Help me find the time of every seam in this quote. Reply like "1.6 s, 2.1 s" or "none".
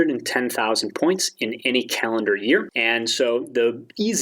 2.7 s